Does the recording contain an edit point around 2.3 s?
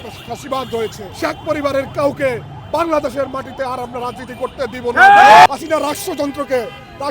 no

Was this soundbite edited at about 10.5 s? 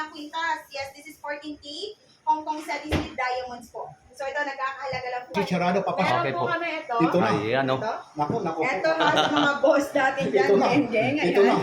no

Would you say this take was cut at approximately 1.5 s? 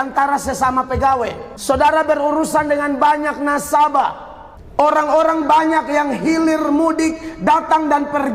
yes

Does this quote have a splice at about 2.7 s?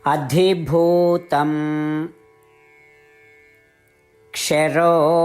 yes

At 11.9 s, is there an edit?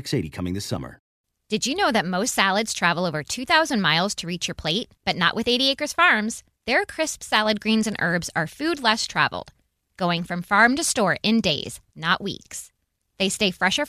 no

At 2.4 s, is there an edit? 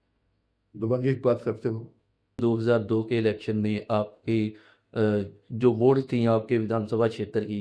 yes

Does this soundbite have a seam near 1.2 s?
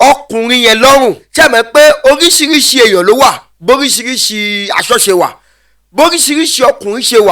yes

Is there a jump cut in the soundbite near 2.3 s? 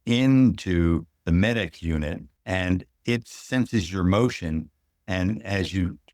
yes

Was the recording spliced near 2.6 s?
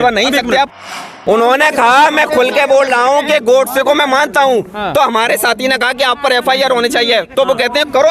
no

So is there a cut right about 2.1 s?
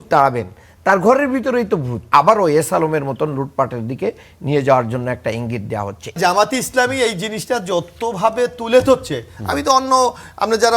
yes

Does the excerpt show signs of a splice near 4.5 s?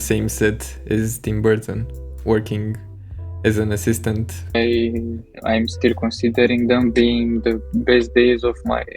yes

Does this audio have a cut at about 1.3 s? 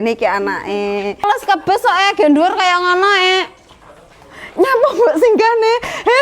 yes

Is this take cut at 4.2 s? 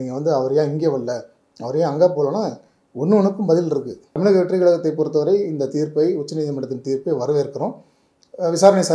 yes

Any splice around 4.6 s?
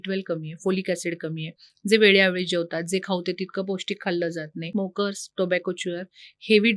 yes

